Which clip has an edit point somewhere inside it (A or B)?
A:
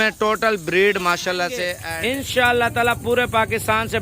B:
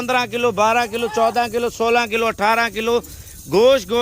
A